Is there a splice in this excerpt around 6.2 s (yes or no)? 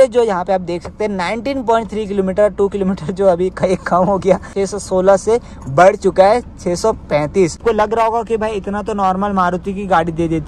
no